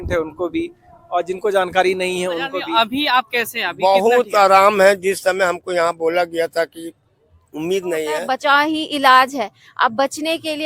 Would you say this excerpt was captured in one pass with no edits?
no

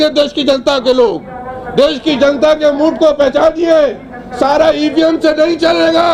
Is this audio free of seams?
yes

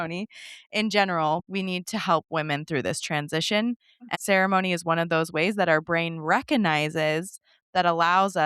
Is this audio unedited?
no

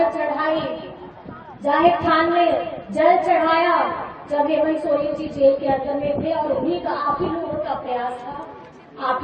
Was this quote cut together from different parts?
no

